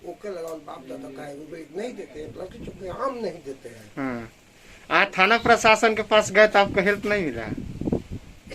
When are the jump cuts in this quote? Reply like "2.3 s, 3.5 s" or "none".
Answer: none